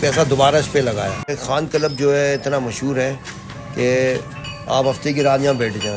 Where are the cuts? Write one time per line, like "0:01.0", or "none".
0:01.3